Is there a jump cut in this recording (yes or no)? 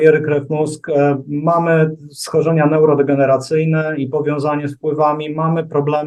no